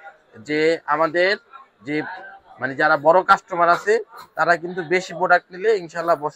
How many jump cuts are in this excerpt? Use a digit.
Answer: 0